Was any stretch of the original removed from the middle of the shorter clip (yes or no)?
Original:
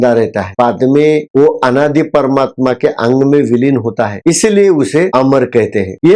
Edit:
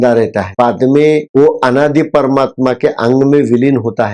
no